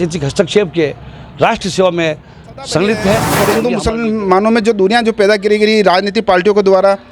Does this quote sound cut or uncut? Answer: cut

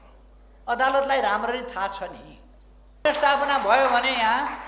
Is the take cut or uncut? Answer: cut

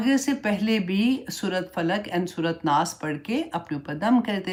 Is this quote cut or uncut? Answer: uncut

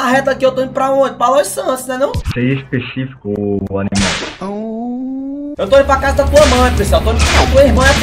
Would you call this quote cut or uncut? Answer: uncut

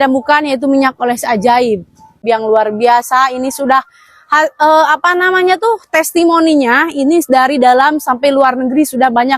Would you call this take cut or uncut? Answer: cut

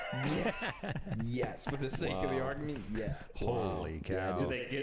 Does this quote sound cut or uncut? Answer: uncut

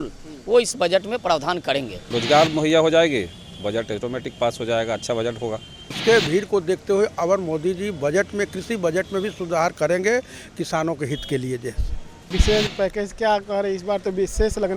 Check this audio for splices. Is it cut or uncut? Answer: cut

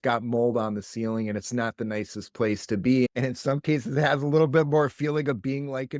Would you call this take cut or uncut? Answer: uncut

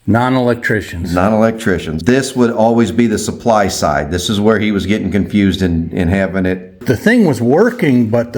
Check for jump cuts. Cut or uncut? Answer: cut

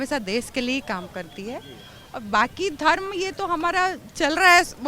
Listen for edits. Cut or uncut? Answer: uncut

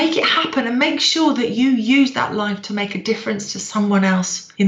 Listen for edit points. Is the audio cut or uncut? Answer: uncut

